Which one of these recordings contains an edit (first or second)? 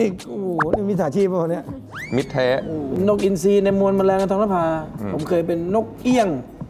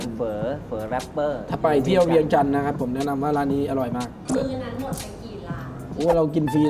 first